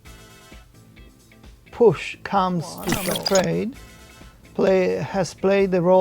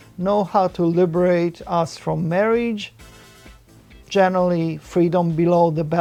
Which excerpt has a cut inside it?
first; 1 cut; at 3.0 s

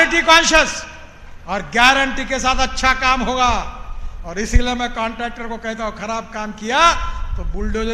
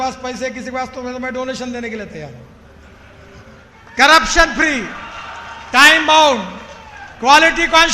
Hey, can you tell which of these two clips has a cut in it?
second; 1 cut; at 3.7 s

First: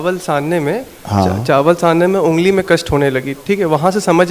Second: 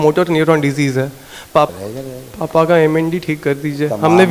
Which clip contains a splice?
second; 1 cut; at 1.7 s

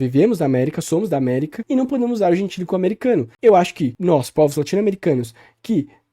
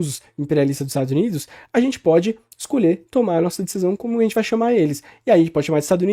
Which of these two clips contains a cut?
first; 3 cuts; at 1.6 s, 3.3 s, 3.9 s

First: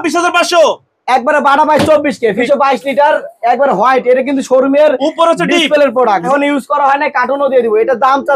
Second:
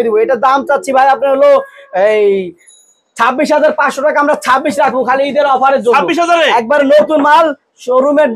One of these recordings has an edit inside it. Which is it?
first; 2 cuts; at 2.4 s, 6.3 s

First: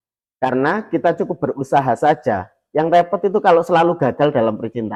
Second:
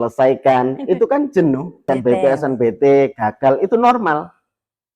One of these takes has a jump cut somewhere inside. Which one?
second; 1 cut; at 1.8 s

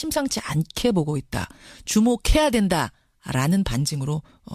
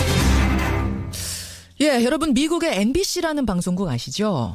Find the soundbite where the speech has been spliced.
first; 1 cut; at 2.2 s

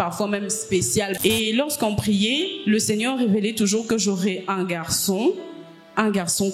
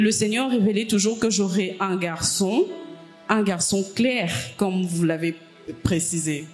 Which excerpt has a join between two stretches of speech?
first; 1 cut; at 1.1 s

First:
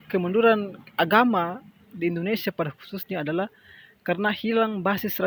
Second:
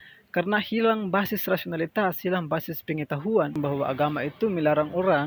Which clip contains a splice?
second; 1 cut; at 3.6 s

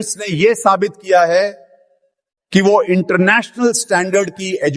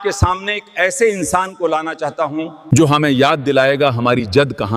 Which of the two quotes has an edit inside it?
second; 1 cut; at 2.6 s

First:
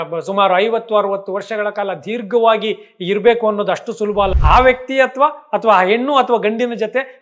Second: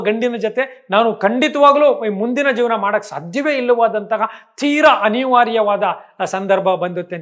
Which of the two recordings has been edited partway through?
first; 1 cut; at 4.4 s

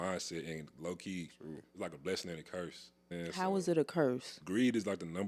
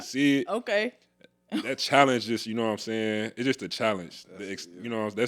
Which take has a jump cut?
first; 2 cuts; at 3.1 s, 4.3 s

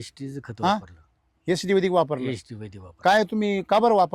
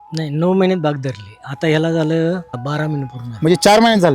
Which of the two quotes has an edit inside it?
second; 1 cut; at 2.6 s

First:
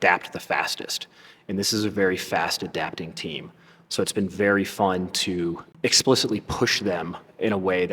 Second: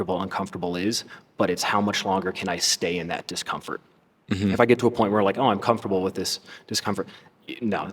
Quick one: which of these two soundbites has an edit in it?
first; 1 cut; at 5.7 s

